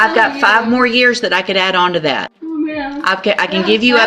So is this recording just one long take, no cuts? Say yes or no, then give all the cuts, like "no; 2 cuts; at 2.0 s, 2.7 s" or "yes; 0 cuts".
no; 1 cut; at 2.3 s